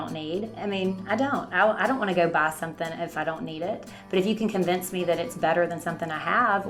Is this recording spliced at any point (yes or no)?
no